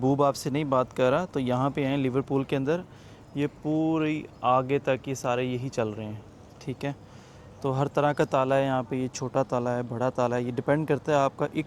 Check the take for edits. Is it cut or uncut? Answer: uncut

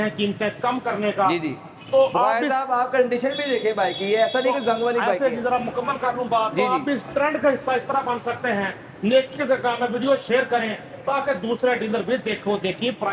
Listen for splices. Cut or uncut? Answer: uncut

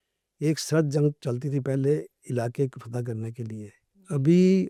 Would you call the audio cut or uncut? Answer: uncut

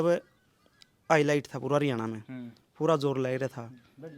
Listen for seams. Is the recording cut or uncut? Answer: uncut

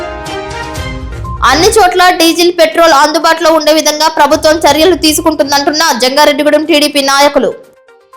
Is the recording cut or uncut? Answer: cut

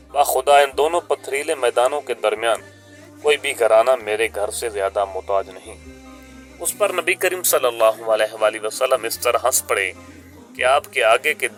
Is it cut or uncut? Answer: uncut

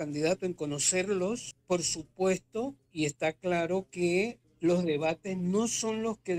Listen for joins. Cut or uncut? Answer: cut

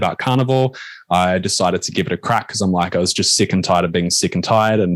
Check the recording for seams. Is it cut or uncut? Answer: uncut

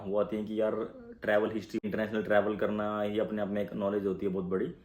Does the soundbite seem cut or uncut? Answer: cut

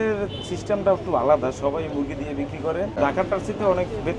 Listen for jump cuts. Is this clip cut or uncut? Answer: cut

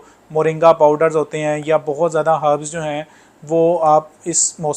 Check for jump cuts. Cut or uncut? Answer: uncut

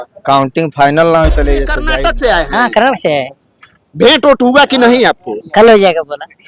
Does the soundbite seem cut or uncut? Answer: cut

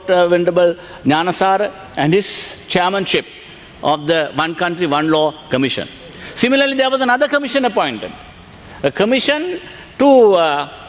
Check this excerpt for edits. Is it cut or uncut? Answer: uncut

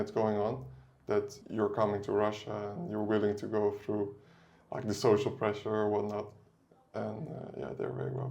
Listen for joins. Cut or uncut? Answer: cut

